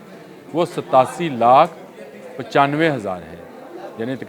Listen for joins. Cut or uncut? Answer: uncut